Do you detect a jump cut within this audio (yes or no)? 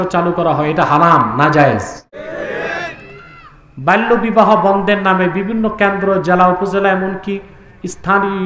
yes